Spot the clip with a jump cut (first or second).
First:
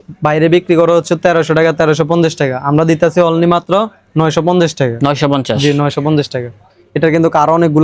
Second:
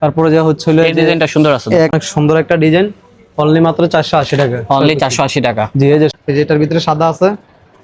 second